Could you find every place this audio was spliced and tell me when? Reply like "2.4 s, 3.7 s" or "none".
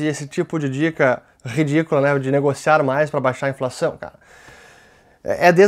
none